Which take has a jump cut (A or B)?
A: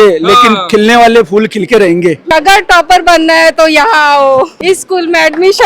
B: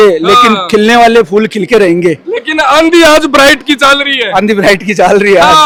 A